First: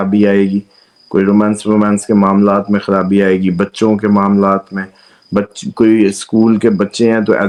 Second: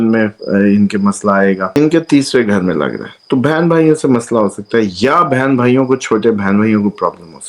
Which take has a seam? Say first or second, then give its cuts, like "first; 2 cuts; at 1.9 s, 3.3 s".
second; 1 cut; at 1.7 s